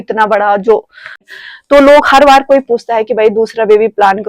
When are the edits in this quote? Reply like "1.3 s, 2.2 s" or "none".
1.3 s